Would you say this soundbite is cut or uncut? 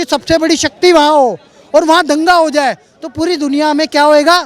uncut